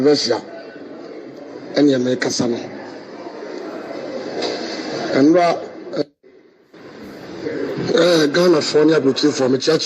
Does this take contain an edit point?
yes; 1 cut; at 6.0 s

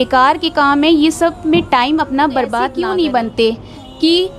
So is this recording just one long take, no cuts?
no; 1 cut; at 2.7 s

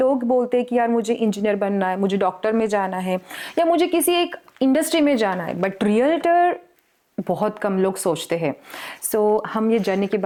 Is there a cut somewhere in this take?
no; 0 cuts

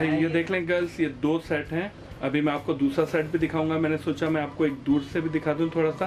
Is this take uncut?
no; 1 cut; at 2.0 s

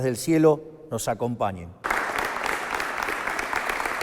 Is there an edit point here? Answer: yes; 1 cut; at 1.8 s

